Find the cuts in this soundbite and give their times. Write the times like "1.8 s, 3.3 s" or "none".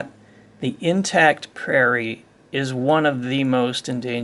none